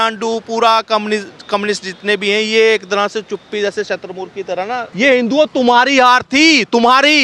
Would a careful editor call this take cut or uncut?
cut